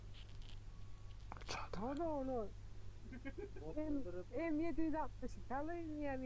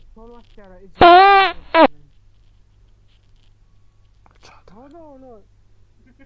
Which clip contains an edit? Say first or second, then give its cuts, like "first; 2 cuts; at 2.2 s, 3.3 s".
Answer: second; 2 cuts; at 0.8 s, 2.0 s